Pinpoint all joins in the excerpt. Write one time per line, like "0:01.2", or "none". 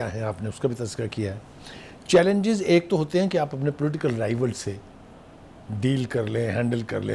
none

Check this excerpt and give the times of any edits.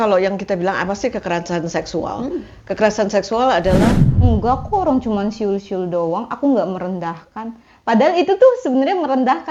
0:04.1

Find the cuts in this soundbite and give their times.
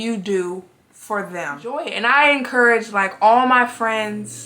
0:01.9

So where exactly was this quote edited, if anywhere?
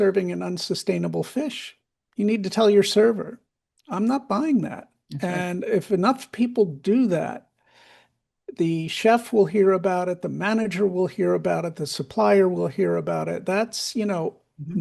none

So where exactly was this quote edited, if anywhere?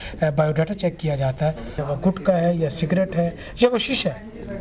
0:01.8

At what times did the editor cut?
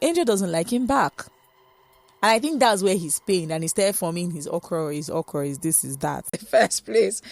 0:06.4

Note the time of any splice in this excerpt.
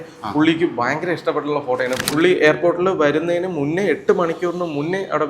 0:02.0

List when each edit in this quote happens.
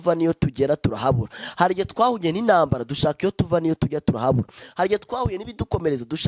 none

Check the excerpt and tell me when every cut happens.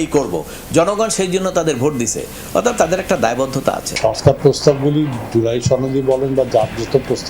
0:03.9

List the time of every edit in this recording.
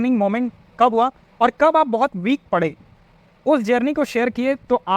none

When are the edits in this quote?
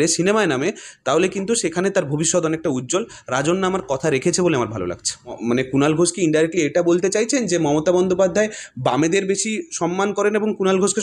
0:05.4

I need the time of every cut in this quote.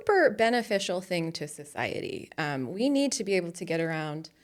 none

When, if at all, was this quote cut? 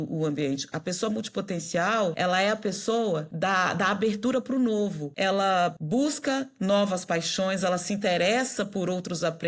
0:02.1
0:03.3
0:05.4

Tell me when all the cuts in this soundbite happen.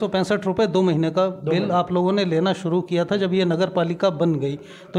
none

